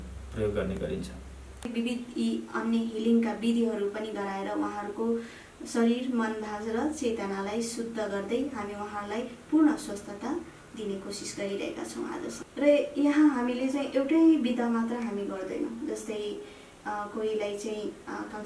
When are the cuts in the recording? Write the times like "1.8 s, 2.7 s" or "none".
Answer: 1.7 s, 12.4 s